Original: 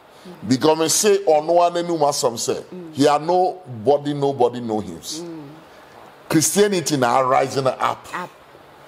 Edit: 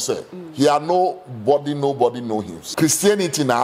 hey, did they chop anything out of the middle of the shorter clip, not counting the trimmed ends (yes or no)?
yes